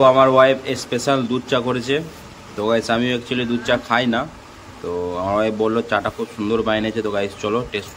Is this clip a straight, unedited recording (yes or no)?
yes